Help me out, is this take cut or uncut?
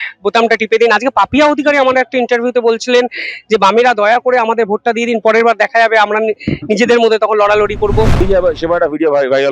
cut